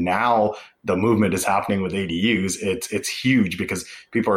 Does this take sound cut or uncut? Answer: uncut